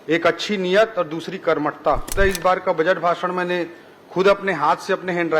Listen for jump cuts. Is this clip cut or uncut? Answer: cut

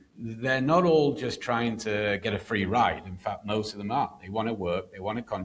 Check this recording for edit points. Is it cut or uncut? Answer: uncut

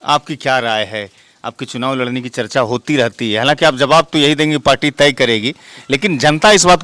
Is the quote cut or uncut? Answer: uncut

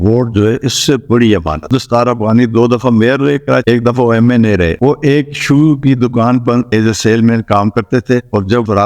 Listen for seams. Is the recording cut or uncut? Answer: cut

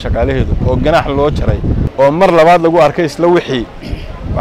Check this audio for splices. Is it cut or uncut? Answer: cut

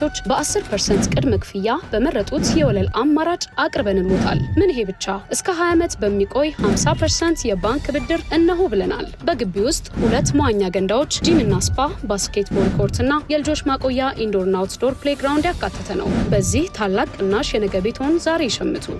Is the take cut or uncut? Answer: uncut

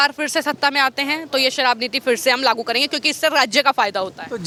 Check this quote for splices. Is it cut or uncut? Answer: uncut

